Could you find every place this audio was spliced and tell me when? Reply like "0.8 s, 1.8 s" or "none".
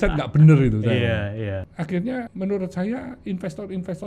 1.5 s, 2.3 s